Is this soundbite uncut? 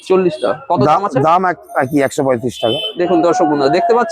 no; 1 cut; at 2.9 s

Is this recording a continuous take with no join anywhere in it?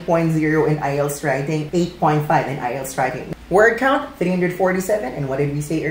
no; 2 cuts; at 1.6 s, 3.2 s

